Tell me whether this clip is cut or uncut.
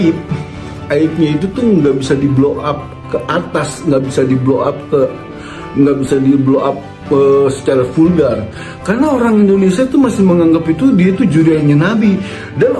uncut